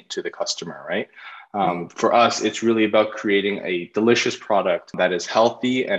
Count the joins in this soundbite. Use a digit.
1